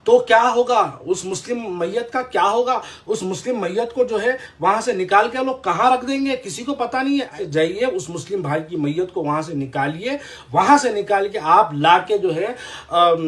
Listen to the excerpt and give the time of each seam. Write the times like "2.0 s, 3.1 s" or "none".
7.3 s